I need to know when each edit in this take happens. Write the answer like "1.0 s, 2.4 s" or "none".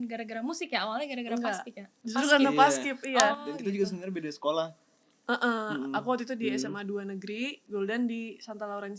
none